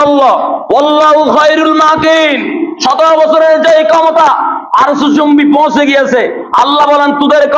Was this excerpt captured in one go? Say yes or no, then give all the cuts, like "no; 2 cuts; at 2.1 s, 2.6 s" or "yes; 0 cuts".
yes; 0 cuts